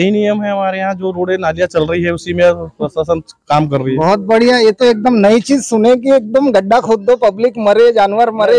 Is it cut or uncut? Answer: uncut